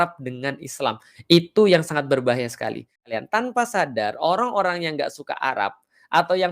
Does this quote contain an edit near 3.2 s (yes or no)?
yes